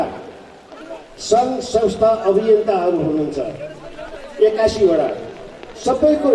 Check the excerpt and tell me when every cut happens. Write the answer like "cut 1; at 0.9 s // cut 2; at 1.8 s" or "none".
none